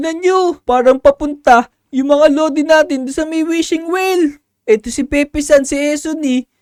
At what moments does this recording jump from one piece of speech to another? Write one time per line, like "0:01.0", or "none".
none